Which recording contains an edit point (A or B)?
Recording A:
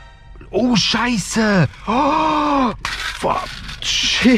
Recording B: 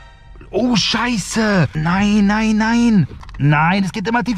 B